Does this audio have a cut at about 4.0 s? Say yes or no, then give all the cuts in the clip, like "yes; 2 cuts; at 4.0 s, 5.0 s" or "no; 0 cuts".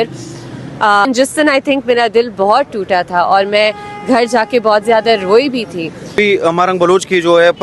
no; 2 cuts; at 1.1 s, 6.2 s